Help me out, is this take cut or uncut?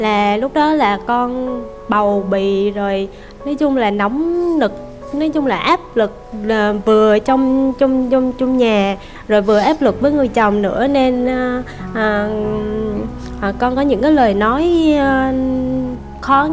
uncut